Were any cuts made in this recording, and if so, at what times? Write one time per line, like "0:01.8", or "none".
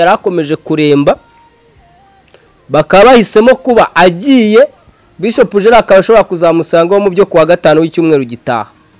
none